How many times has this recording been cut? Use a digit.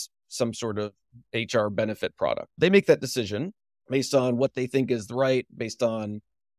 1